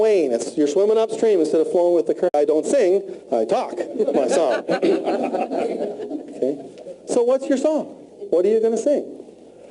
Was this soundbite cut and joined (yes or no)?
no